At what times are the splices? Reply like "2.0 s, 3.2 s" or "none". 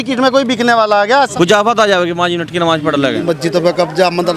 1.3 s, 3.2 s